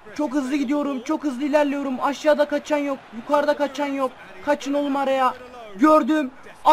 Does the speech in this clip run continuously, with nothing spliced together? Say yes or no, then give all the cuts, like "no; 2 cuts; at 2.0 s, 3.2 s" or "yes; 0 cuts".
yes; 0 cuts